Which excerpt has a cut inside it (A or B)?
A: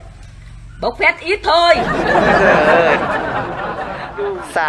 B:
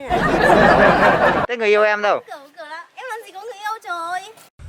B